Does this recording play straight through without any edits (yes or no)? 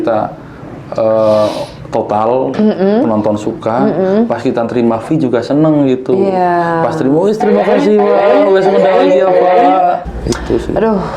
no